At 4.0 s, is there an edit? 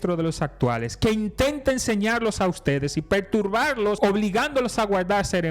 yes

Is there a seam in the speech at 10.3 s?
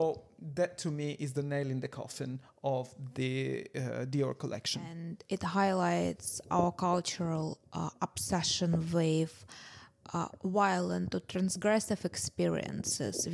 no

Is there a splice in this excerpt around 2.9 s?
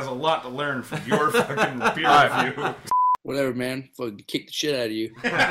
yes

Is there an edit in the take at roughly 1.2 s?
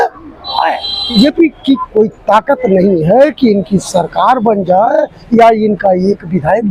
yes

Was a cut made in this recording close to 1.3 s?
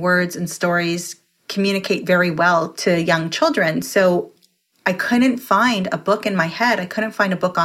no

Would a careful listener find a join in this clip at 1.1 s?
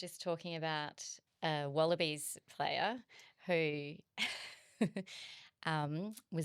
yes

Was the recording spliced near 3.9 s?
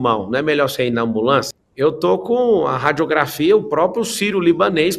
no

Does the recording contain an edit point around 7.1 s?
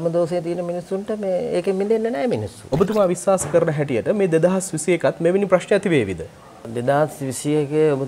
no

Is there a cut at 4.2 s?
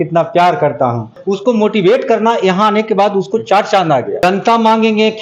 yes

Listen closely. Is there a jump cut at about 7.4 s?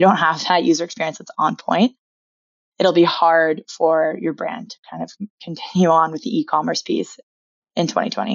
yes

